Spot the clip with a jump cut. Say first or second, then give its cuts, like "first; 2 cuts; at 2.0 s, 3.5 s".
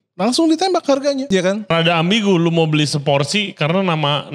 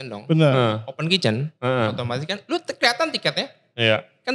first; 1 cut; at 1.7 s